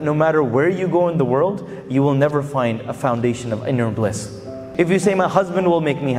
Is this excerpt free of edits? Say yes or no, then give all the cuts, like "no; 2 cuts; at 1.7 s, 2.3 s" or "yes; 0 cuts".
no; 1 cut; at 4.6 s